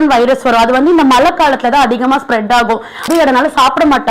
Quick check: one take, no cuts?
no; 1 cut; at 3.1 s

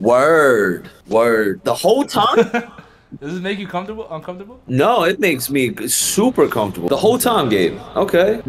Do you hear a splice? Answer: no; 0 cuts

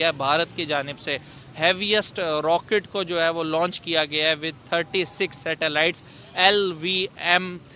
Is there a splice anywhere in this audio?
no; 0 cuts

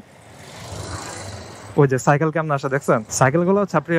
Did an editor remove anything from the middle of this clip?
yes; 1 cut; at 3.1 s

